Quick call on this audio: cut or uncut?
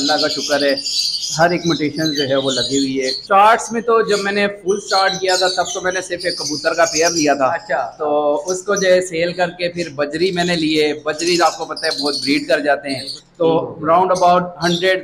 cut